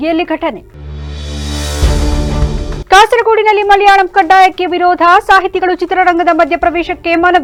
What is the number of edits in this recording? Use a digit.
0